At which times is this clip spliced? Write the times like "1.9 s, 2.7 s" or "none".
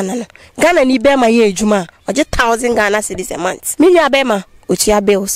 3.6 s